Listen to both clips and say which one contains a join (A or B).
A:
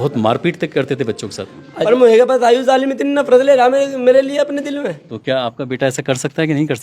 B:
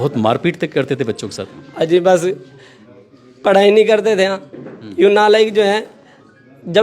A